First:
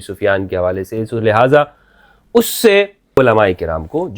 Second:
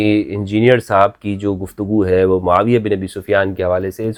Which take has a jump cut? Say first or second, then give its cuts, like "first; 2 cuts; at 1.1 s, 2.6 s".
first; 1 cut; at 3.1 s